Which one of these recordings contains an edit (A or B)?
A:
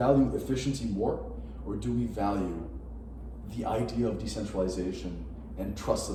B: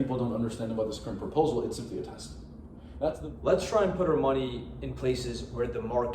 B